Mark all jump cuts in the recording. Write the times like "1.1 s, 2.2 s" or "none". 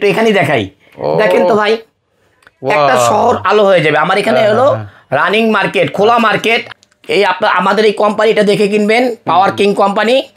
6.7 s